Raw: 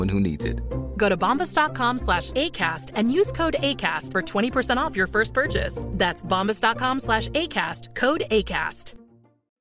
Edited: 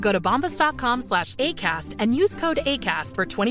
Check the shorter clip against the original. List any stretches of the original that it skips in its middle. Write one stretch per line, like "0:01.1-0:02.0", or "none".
none